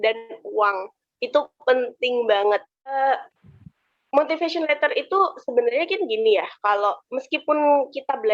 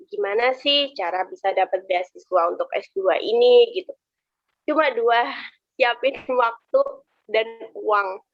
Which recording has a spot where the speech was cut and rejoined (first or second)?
first